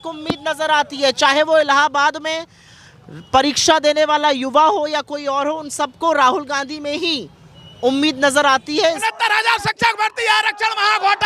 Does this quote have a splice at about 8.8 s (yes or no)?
yes